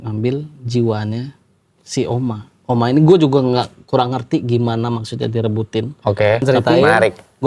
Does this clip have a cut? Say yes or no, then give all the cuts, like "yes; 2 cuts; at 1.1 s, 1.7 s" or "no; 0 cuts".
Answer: yes; 1 cut; at 6.4 s